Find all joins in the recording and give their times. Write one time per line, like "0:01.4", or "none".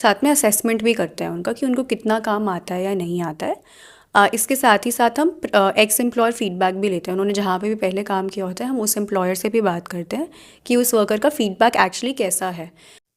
none